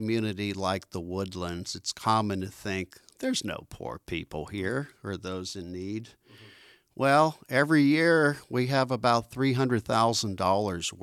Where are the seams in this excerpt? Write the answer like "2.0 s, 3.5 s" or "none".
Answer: none